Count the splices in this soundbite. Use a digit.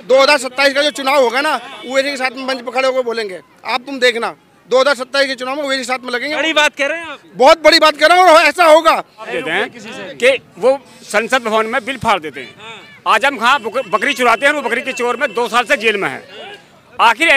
1